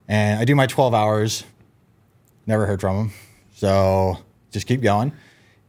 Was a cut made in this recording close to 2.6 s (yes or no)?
no